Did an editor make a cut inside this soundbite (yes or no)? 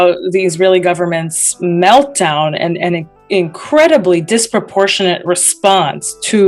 no